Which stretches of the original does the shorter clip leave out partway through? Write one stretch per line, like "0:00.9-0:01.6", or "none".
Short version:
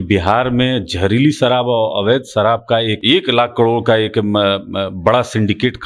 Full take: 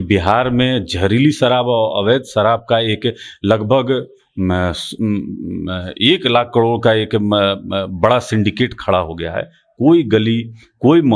0:03.0-0:05.9